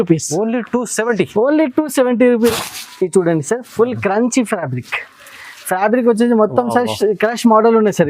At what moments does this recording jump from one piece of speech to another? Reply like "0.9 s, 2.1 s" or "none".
2.5 s